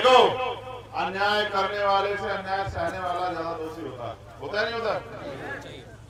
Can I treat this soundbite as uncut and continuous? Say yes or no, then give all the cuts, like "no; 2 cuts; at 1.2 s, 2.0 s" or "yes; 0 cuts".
yes; 0 cuts